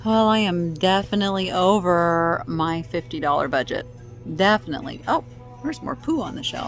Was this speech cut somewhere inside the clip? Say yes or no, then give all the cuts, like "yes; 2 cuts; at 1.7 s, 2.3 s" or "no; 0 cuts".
no; 0 cuts